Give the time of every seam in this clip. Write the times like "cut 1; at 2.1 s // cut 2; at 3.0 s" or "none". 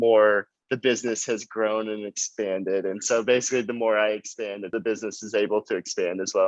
cut 1; at 4.7 s